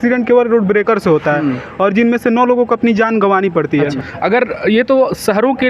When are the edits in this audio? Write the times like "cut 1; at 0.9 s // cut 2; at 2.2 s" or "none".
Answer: cut 1; at 4.0 s